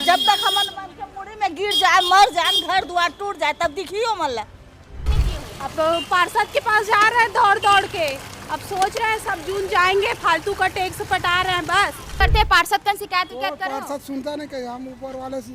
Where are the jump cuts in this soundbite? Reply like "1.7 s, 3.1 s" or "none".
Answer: 5.0 s, 12.1 s

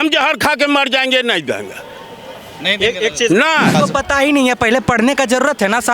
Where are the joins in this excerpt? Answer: 3.7 s

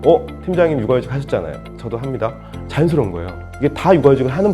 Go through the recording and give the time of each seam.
3.4 s

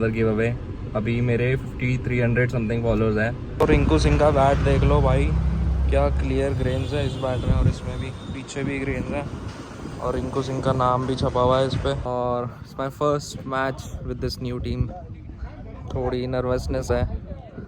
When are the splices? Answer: 3.5 s, 12.0 s

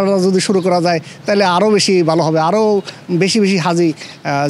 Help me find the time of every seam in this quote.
none

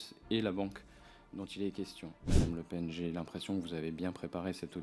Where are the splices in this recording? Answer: 2.3 s

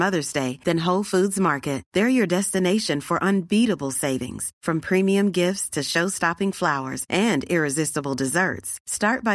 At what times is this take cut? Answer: none

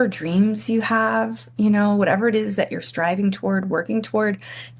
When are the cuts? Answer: none

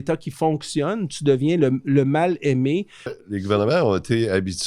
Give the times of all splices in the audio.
3.2 s

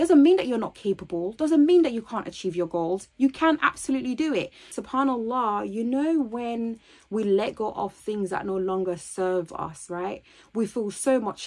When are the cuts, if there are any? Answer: 4.8 s

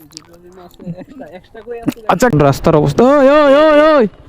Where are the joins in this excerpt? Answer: 2.3 s

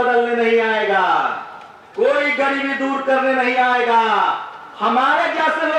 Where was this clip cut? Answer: none

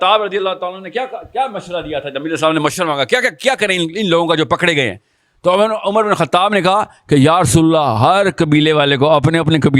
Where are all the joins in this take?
none

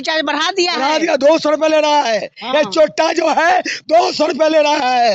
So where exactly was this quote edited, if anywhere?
none

